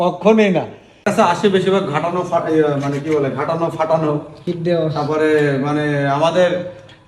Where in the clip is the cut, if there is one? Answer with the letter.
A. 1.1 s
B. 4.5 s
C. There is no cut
A